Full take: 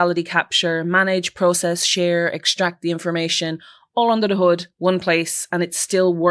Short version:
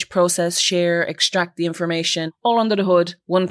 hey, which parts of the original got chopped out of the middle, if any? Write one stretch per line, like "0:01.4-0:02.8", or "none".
0:03.6-0:03.8